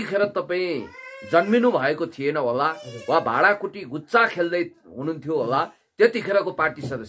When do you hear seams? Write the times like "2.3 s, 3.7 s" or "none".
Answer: none